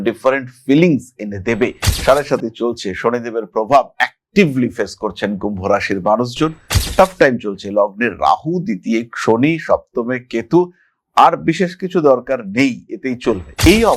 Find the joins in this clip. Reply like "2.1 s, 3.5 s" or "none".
1.9 s

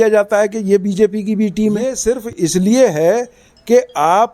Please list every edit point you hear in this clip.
2.0 s

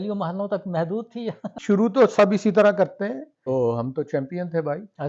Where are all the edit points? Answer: 1.6 s, 3.4 s

